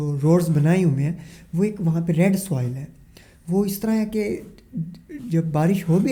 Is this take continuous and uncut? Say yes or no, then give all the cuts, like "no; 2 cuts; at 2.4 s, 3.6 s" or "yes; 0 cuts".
yes; 0 cuts